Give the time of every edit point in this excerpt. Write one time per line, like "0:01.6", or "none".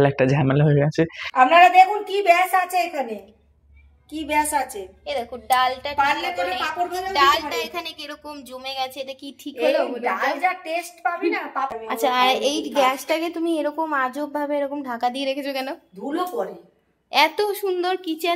0:01.0
0:11.7

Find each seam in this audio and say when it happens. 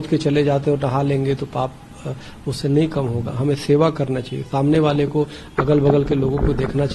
none

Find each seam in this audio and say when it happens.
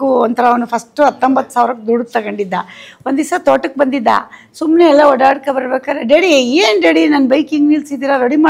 none

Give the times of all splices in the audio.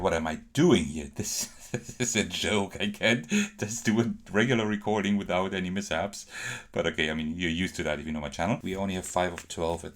0:08.6

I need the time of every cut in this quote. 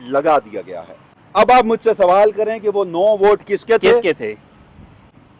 0:01.2

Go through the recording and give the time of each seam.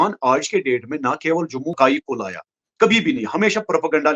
0:01.7

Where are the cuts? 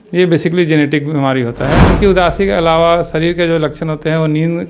0:01.9

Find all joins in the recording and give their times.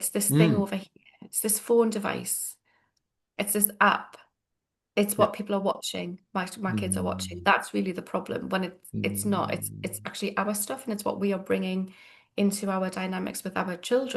none

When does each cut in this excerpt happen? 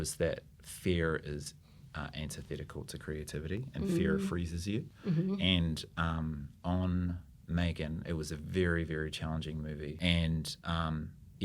0:09.9

